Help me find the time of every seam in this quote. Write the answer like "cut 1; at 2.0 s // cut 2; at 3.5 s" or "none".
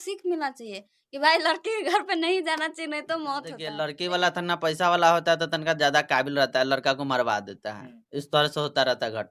cut 1; at 3.6 s